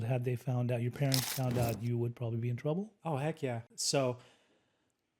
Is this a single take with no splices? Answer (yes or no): no